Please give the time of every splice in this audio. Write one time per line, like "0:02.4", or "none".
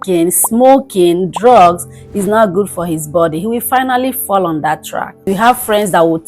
0:05.3